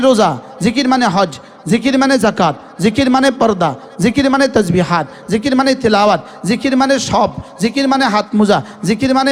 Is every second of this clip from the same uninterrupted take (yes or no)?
yes